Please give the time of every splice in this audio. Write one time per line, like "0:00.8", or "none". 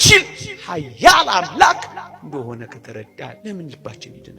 0:03.4